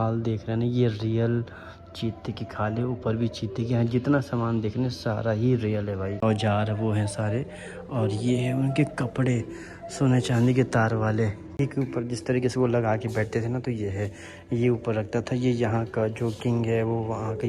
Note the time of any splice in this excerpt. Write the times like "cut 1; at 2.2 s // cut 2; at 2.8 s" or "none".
cut 1; at 6.1 s // cut 2; at 11.5 s